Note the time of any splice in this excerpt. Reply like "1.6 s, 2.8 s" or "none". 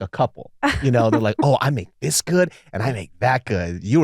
none

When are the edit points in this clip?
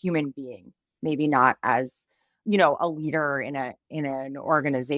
2.3 s

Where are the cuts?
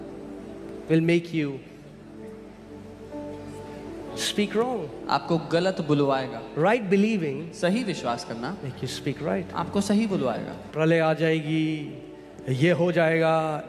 10.6 s

